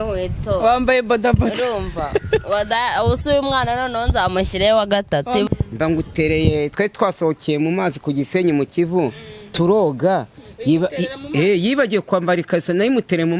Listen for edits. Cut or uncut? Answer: cut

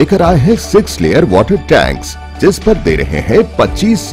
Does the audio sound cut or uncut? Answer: uncut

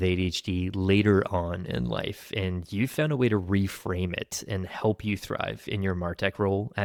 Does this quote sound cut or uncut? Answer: uncut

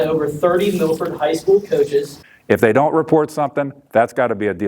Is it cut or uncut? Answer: cut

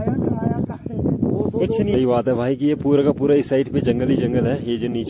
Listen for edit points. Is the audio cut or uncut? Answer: cut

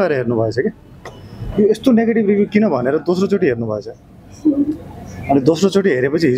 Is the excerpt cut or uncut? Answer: uncut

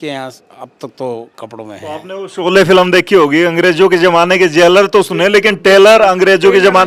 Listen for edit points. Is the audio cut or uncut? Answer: uncut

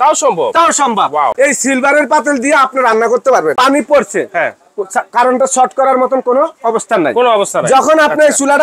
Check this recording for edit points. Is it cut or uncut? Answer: cut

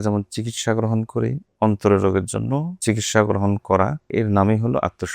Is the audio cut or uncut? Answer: cut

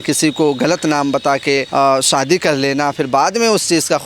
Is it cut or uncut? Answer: cut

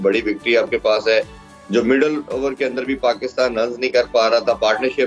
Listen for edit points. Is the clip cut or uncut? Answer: uncut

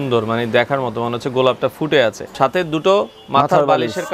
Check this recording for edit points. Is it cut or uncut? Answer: cut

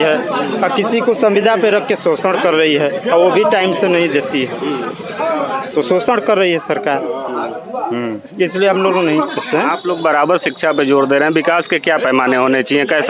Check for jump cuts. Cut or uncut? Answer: uncut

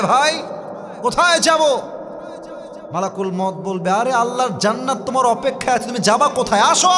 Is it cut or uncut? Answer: uncut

